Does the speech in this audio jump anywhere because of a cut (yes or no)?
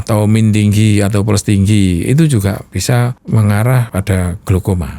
yes